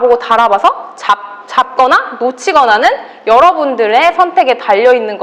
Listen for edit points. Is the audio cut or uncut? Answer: uncut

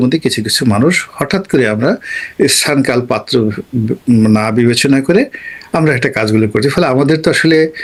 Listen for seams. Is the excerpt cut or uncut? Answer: uncut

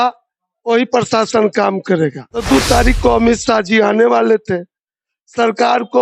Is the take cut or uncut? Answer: cut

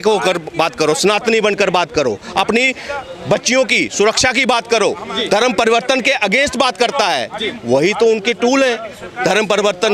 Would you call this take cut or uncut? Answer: uncut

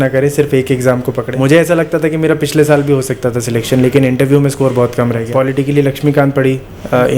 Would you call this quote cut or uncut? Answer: cut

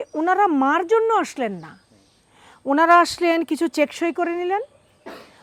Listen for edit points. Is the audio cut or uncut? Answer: uncut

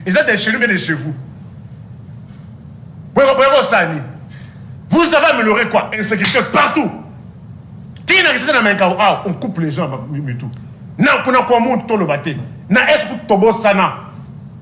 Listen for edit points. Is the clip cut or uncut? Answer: uncut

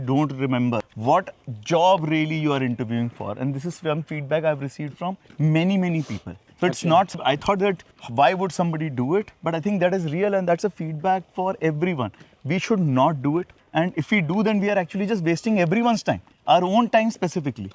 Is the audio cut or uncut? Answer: uncut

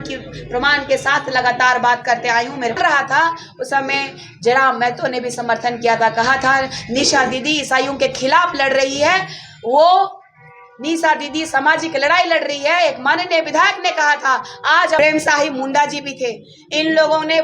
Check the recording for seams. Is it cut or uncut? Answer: cut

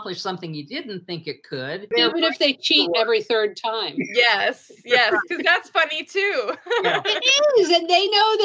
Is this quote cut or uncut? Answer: cut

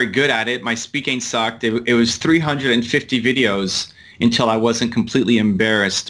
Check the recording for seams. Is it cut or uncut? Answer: uncut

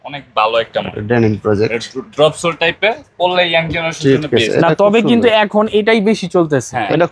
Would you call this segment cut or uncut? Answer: uncut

